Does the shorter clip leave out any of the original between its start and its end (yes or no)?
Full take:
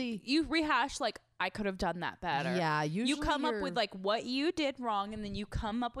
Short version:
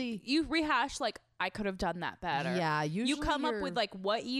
no